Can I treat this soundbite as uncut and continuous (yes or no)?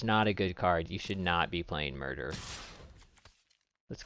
yes